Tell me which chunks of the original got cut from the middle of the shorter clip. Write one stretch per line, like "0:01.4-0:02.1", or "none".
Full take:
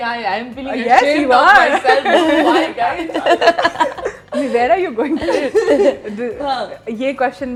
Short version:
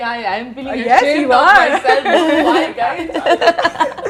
none

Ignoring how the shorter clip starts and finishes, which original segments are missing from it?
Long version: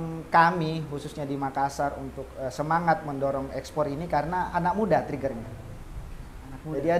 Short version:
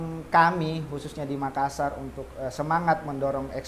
none

